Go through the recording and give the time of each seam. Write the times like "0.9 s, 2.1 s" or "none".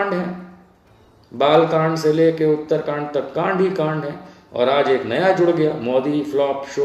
none